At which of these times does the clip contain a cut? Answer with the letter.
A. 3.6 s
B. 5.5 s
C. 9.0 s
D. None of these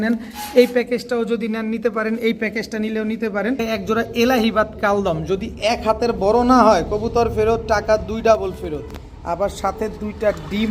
A